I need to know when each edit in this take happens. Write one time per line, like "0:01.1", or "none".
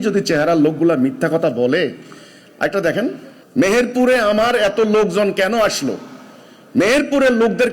0:03.3